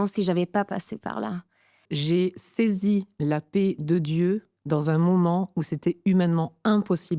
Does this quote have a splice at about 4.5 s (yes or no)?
yes